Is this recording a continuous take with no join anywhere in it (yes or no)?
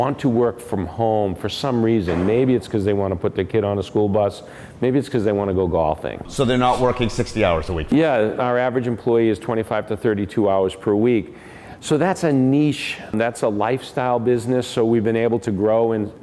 yes